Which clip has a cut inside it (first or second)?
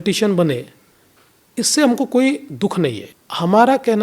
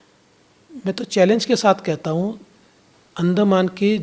first